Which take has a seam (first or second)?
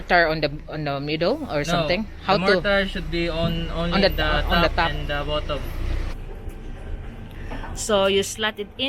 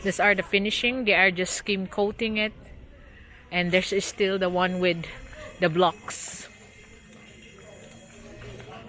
first